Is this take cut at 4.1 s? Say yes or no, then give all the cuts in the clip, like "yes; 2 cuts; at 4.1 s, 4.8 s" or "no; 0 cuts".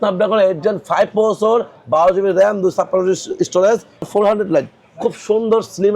yes; 1 cut; at 4.1 s